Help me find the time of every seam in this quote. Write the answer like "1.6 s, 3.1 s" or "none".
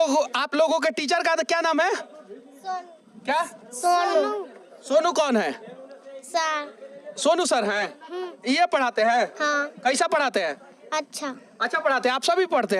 none